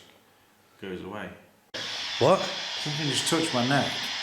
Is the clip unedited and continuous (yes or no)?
no